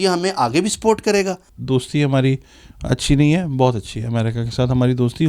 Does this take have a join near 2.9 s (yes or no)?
no